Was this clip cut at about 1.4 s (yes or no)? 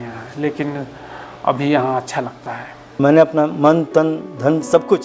no